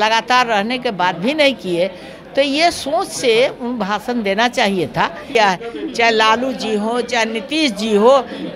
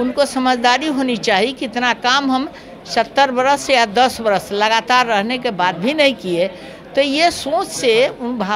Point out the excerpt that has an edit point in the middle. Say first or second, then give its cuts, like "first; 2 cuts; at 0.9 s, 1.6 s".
first; 1 cut; at 5.3 s